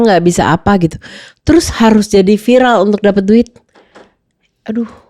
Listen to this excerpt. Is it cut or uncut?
uncut